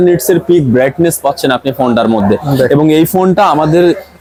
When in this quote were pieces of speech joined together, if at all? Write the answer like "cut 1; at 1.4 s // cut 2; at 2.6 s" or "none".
none